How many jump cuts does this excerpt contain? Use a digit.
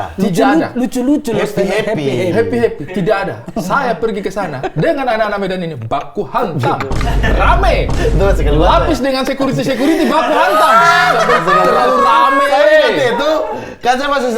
0